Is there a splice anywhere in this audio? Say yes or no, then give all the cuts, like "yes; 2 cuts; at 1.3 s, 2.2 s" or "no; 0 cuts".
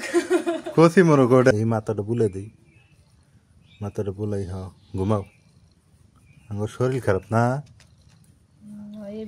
yes; 1 cut; at 1.5 s